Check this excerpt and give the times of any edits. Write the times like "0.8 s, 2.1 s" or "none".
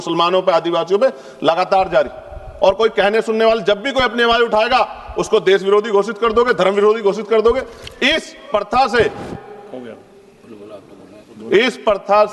none